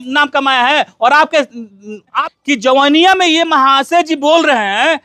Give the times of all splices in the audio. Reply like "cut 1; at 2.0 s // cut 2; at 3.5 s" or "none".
cut 1; at 2.2 s